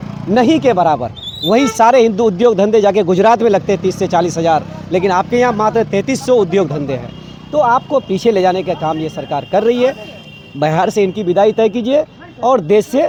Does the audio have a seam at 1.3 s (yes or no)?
no